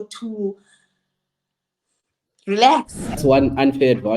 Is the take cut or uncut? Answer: cut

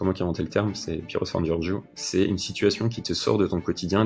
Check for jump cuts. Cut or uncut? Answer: uncut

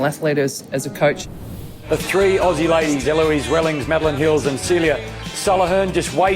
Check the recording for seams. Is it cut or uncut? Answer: cut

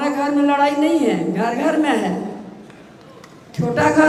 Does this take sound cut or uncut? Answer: uncut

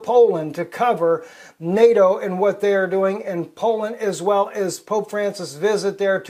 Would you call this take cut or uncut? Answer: uncut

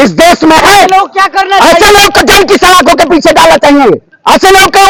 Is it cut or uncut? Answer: uncut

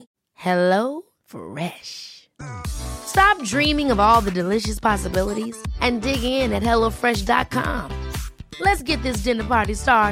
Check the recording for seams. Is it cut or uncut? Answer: uncut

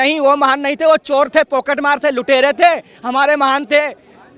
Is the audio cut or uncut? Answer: uncut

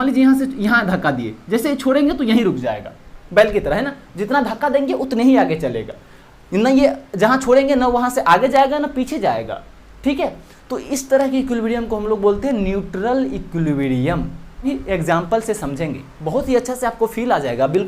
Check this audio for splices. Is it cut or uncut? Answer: cut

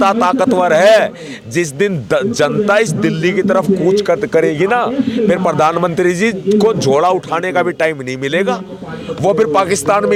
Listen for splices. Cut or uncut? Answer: uncut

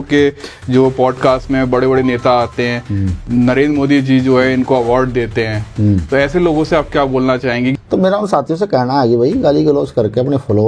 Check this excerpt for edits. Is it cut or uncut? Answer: cut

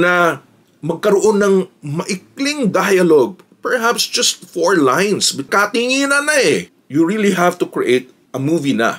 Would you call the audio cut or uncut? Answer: cut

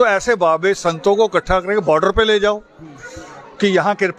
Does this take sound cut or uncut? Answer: uncut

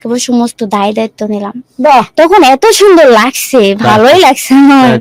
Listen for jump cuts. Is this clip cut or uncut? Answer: uncut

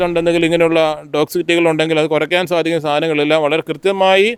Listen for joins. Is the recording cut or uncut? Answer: uncut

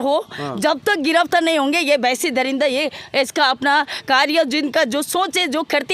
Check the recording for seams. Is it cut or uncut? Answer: uncut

